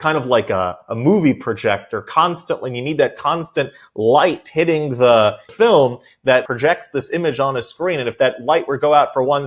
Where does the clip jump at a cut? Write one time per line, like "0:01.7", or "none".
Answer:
0:05.4
0:06.4